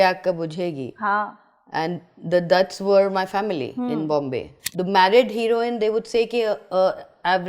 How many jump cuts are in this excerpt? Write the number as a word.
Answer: one